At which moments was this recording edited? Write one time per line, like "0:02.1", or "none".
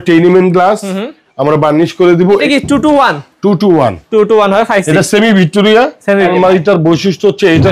0:02.4
0:06.2